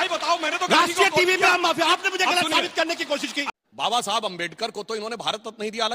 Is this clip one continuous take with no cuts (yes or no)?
no